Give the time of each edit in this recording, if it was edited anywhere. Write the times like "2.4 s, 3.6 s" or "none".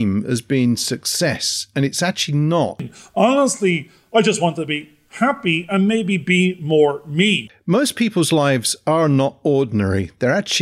2.9 s, 7.5 s